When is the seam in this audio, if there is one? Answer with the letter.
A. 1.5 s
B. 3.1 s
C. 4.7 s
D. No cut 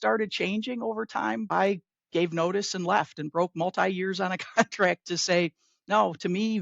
A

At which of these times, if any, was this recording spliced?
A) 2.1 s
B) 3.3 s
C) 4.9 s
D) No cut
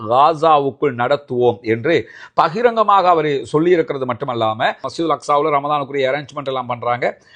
C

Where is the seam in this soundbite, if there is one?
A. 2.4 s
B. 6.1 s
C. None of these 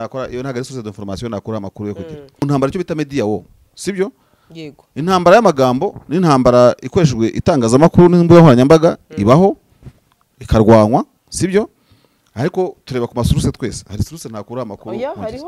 A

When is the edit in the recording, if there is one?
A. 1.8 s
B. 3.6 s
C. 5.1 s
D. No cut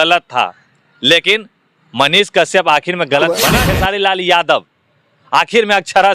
B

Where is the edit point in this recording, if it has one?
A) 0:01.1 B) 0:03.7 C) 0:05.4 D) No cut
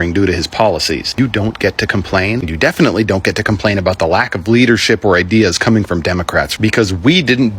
A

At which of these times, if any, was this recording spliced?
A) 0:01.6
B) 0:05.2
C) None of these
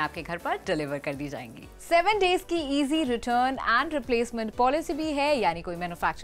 A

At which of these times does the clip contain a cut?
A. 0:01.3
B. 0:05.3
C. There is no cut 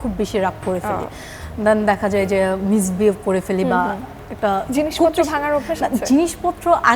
C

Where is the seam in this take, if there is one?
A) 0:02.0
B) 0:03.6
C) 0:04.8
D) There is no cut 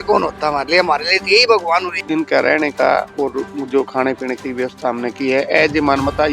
A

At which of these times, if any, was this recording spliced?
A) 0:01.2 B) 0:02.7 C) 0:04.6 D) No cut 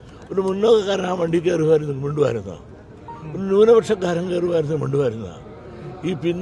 D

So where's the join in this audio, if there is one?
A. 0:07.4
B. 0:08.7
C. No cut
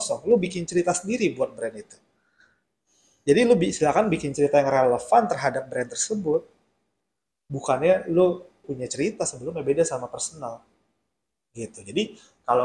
B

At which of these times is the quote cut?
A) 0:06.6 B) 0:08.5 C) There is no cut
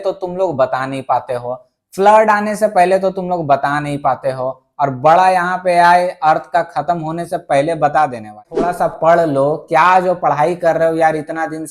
B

